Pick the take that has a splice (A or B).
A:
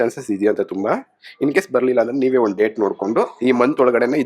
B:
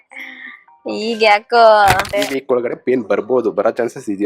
B